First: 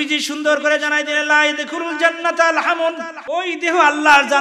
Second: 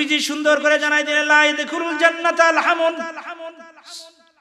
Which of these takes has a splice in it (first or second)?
first